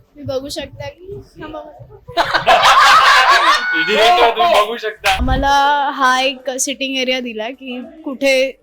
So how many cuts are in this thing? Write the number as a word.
one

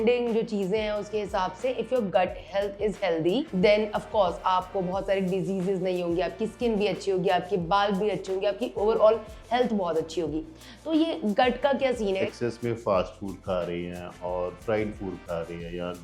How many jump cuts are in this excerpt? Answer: three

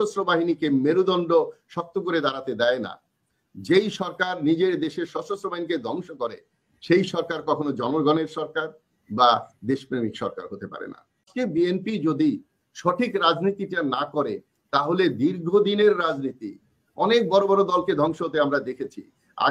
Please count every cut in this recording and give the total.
one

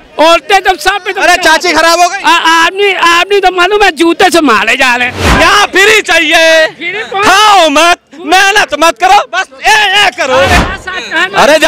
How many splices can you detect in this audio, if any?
two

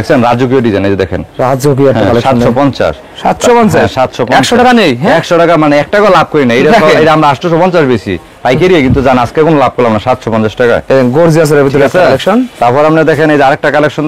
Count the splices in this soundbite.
zero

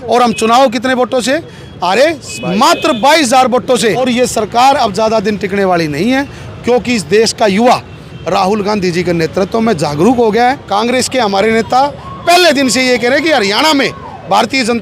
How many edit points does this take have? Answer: two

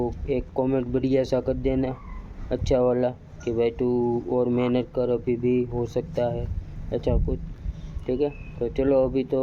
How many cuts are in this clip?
zero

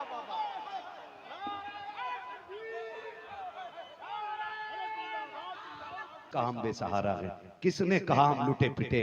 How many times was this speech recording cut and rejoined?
one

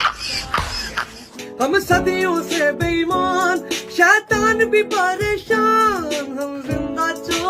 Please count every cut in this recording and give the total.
one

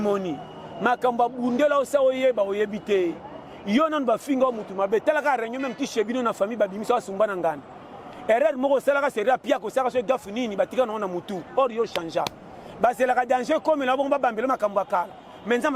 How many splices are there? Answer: zero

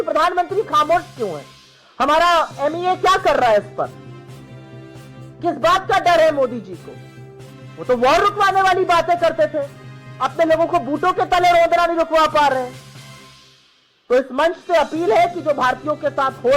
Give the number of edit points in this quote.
zero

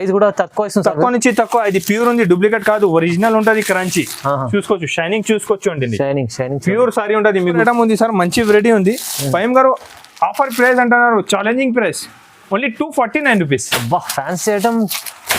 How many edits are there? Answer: one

